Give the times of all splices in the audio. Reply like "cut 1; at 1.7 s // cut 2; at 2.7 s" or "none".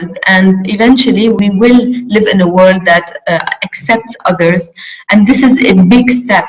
cut 1; at 1.4 s

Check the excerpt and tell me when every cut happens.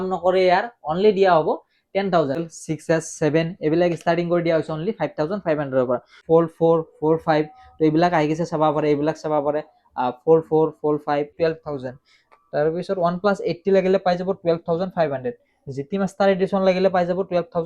cut 1; at 2.5 s // cut 2; at 6.1 s // cut 3; at 11.3 s

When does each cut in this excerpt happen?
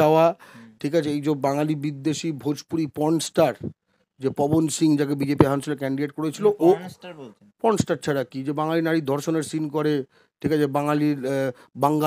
none

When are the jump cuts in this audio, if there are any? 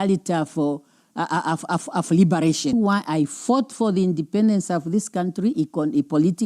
cut 1; at 2.7 s

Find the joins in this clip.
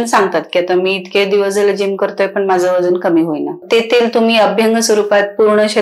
cut 1; at 3.6 s

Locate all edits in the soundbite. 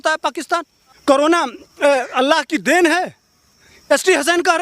cut 1; at 1.0 s

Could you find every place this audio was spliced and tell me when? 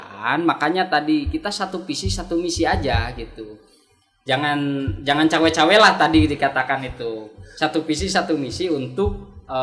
none

